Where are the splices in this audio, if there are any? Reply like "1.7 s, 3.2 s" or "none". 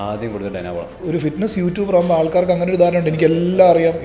1.0 s